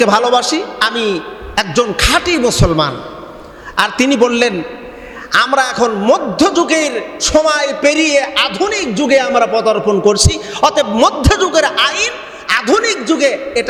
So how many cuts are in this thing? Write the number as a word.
zero